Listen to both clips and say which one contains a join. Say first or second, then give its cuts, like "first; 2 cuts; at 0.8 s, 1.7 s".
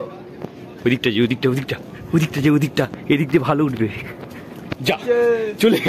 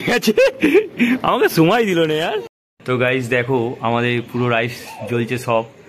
second; 1 cut; at 2.7 s